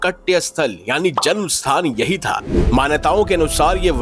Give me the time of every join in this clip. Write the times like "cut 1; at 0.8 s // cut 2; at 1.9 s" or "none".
cut 1; at 2.5 s